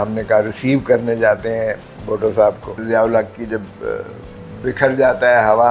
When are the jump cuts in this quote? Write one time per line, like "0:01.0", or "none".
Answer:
0:02.8